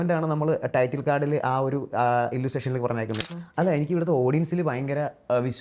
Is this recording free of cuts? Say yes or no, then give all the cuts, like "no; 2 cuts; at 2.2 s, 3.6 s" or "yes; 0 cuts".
no; 1 cut; at 3.2 s